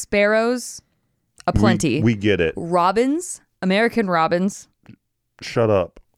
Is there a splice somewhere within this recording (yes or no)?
no